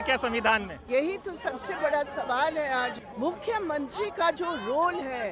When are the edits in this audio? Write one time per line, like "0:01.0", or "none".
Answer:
0:00.9
0:03.0